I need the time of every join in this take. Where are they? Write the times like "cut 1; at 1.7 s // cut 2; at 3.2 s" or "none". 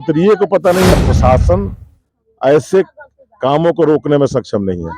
cut 1; at 0.9 s